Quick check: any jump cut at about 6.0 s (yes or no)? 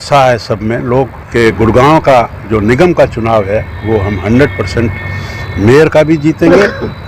no